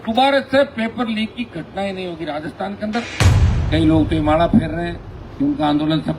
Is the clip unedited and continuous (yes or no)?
no